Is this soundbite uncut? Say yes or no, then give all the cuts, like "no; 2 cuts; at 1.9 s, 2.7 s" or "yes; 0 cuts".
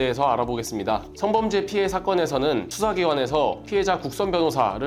no; 1 cut; at 1.1 s